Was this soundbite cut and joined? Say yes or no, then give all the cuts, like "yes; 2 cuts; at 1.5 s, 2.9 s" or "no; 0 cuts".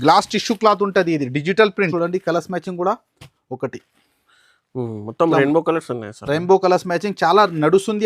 yes; 1 cut; at 1.9 s